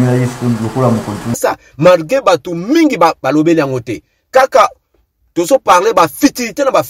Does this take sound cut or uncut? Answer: cut